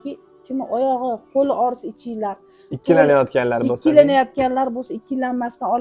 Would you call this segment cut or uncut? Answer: uncut